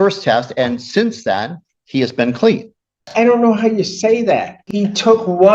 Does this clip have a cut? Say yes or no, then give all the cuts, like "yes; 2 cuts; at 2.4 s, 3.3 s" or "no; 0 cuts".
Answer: yes; 2 cuts; at 3.1 s, 4.6 s